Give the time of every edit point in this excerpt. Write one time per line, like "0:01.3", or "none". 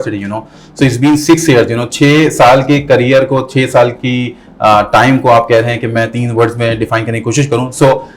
none